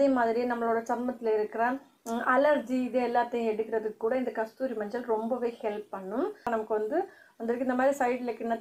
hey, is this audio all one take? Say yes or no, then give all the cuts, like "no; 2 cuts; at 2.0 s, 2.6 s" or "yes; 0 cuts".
no; 1 cut; at 6.5 s